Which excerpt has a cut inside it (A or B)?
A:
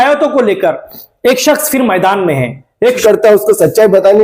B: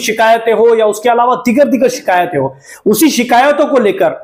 A